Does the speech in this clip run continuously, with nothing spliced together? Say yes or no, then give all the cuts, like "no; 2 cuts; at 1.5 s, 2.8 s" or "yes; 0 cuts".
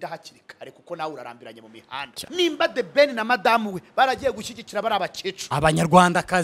no; 1 cut; at 2.1 s